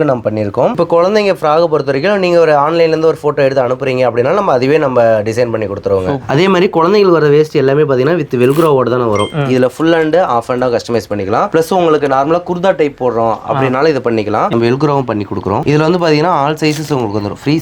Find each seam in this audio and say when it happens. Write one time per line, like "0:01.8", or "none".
0:00.8
0:06.2
0:09.3
0:11.5
0:14.5
0:15.6